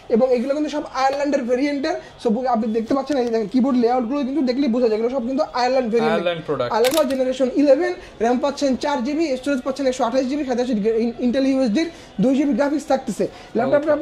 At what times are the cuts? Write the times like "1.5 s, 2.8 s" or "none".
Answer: 6.9 s